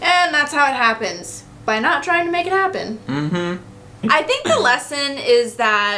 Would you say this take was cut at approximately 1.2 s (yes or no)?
no